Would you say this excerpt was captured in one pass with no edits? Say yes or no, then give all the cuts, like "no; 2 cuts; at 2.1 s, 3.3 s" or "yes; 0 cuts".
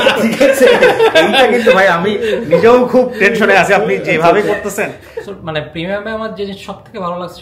no; 1 cut; at 5.0 s